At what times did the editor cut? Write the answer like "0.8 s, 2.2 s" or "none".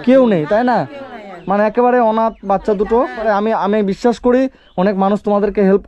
3.2 s

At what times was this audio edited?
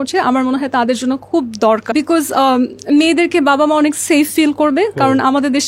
1.9 s

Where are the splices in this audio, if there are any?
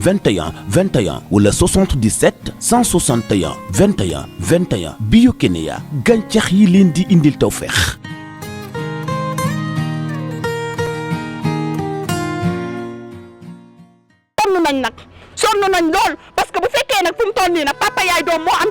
14.4 s

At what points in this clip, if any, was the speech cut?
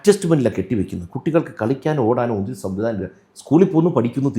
none

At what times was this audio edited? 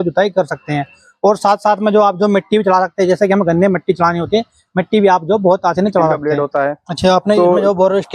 6.3 s

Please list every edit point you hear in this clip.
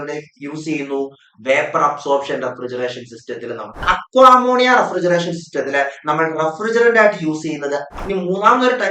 3.8 s, 7.9 s

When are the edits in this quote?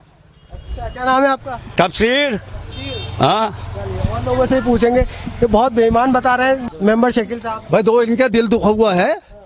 6.7 s

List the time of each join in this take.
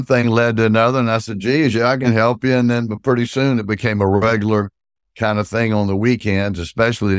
none

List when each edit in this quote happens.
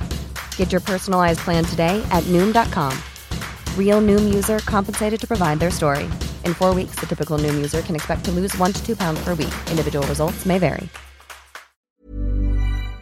11.9 s

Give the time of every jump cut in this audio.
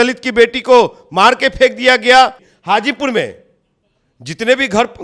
2.5 s

